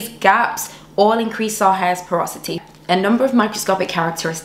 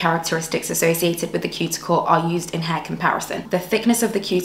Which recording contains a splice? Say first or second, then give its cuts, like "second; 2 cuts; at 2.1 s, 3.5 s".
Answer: first; 1 cut; at 2.6 s